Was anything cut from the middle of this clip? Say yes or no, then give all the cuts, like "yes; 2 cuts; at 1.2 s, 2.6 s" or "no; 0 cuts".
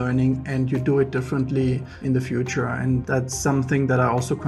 yes; 2 cuts; at 1.9 s, 3.0 s